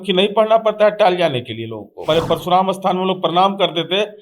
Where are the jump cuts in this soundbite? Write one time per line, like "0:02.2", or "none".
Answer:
0:02.0

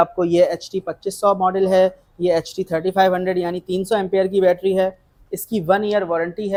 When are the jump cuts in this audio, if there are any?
none

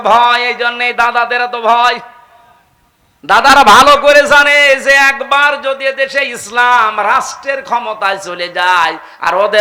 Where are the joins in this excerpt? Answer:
none

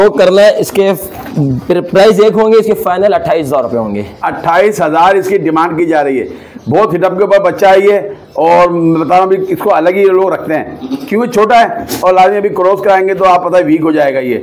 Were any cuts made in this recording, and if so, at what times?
none

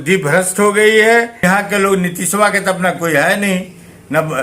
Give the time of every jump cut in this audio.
0:01.4

